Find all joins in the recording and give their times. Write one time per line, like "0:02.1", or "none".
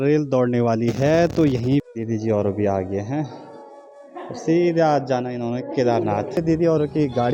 0:01.9
0:06.4